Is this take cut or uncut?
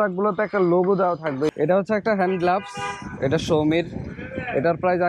cut